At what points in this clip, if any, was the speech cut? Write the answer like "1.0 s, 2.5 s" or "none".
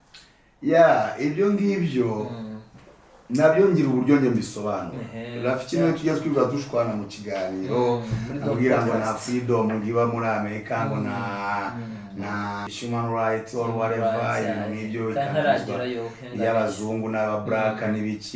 12.7 s